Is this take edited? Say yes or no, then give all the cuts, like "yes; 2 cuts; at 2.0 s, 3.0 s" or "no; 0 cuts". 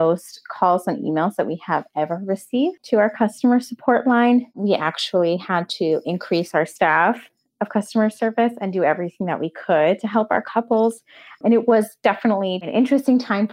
yes; 1 cut; at 12.6 s